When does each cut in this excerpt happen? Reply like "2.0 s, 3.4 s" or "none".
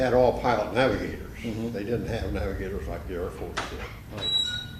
2.1 s